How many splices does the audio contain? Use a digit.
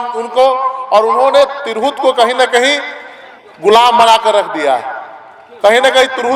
0